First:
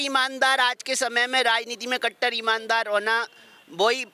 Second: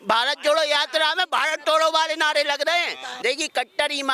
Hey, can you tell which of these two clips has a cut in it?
second; 1 cut; at 3.0 s

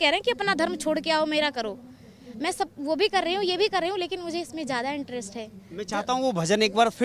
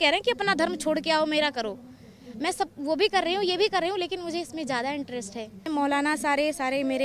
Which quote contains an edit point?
second; 1 cut; at 5.7 s

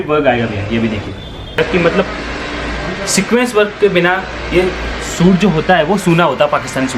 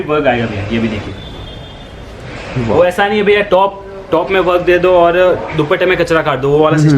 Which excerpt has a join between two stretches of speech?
first; 1 cut; at 1.6 s

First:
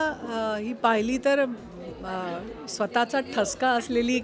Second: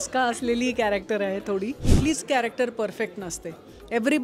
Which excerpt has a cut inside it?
second; 1 cut; at 1.9 s

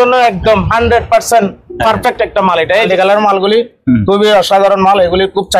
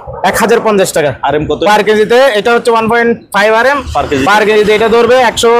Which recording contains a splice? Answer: first; 1 cut; at 2.8 s

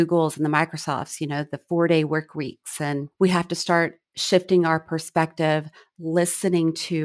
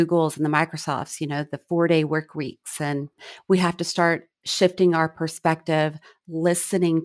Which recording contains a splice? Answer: first; 1 cut; at 3.1 s

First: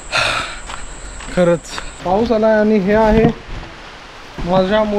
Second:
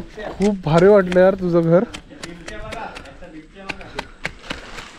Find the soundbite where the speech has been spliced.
first; 1 cut; at 2.0 s

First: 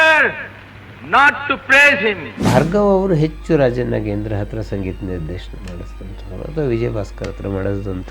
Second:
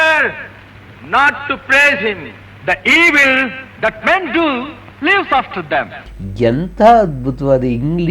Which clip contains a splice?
first; 1 cut; at 2.3 s

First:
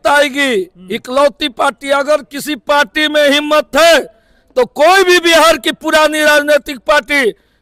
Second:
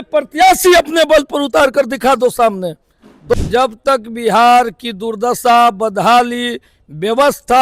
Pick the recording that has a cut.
second; 1 cut; at 3.3 s

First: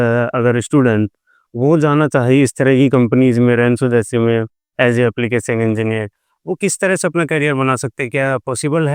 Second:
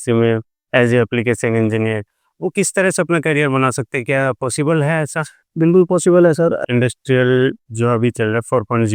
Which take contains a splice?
second; 1 cut; at 6.6 s

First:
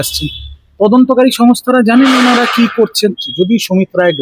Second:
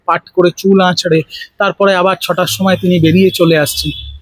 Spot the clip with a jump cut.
first; 1 cut; at 3.2 s

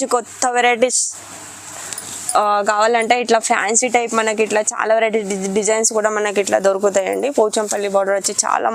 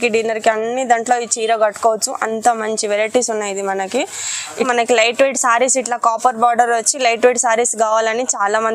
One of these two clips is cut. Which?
second; 1 cut; at 4.6 s

